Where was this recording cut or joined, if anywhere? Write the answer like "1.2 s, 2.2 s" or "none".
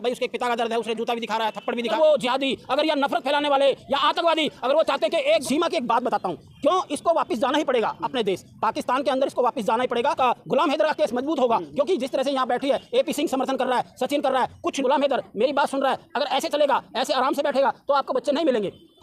1.9 s, 5.4 s, 10.2 s, 14.8 s